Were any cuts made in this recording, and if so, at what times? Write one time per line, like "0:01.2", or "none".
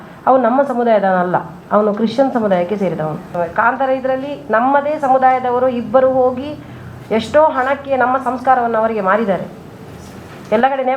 0:03.3